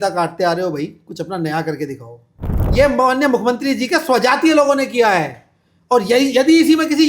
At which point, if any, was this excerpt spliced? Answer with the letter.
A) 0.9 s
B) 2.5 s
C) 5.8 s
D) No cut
B